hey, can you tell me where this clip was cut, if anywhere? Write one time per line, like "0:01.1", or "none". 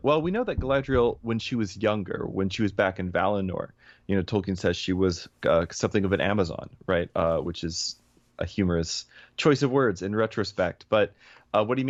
none